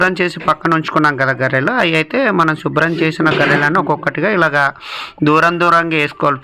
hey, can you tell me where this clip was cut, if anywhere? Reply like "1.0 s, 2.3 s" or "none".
none